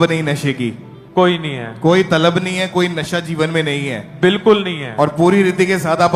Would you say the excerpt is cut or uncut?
uncut